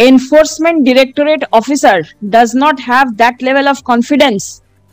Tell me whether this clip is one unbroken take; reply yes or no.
yes